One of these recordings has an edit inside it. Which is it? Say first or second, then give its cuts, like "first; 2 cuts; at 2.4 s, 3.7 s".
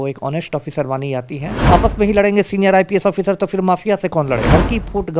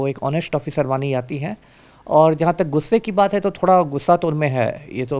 first; 2 cuts; at 1.7 s, 4.4 s